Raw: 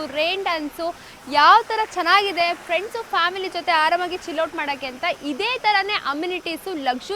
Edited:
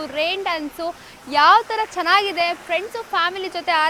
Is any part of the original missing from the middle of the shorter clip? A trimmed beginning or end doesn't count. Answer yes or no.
no